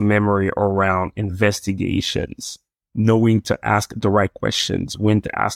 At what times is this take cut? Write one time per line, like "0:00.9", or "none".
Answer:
none